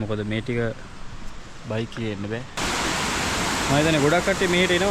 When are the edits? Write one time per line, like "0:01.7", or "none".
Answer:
0:02.6